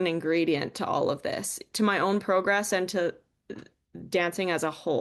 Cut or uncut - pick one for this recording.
uncut